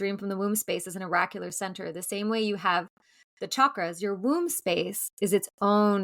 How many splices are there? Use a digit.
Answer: 0